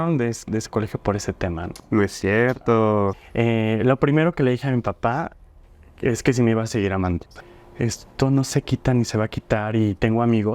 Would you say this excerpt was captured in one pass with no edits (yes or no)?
no